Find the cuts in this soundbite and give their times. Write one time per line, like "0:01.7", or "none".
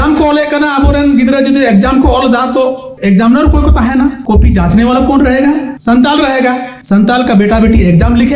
0:02.9
0:04.2
0:05.7
0:06.7